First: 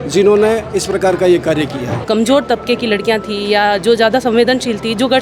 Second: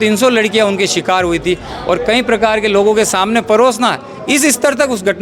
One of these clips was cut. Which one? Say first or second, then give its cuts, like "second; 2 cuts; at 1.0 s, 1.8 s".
first; 1 cut; at 1.9 s